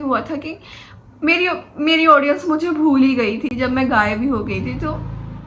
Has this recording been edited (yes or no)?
no